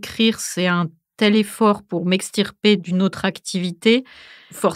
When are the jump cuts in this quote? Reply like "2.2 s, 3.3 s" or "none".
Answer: none